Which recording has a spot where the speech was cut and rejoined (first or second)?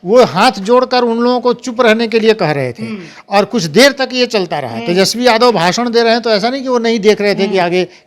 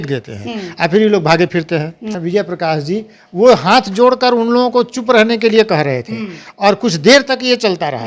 second